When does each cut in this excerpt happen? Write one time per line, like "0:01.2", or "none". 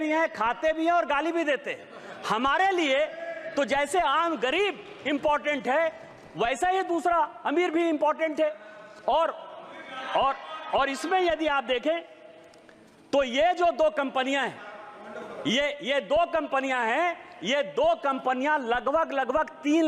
none

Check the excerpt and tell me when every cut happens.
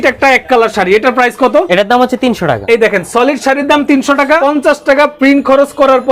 0:01.7
0:02.6
0:04.4

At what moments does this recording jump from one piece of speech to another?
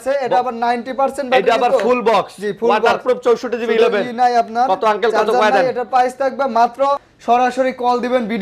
0:07.1

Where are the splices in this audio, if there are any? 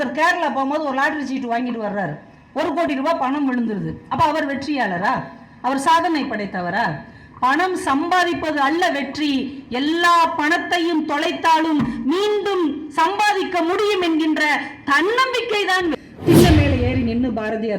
0:16.0

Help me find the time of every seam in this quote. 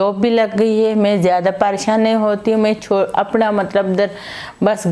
none

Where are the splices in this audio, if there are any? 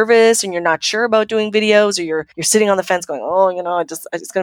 0:02.3

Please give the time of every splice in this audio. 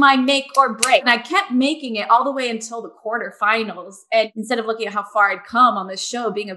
0:01.0
0:04.3

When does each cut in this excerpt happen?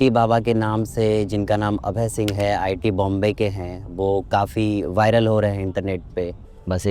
none

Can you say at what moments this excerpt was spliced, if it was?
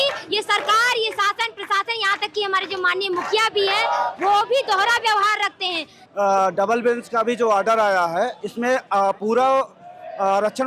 0:06.0

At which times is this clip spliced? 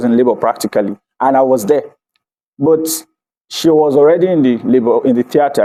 none

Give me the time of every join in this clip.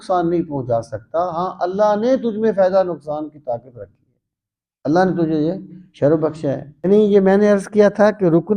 0:06.9

